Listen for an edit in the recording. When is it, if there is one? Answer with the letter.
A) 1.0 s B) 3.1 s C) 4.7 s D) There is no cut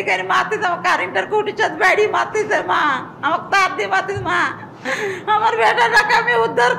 C